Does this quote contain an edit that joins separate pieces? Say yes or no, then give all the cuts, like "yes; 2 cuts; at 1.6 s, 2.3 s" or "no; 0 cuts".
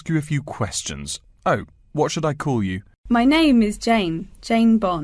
yes; 1 cut; at 2.9 s